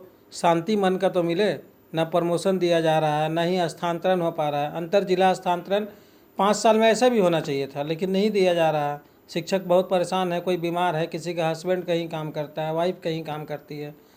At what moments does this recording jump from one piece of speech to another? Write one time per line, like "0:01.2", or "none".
none